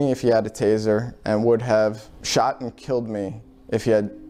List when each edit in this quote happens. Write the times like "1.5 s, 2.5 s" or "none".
2.1 s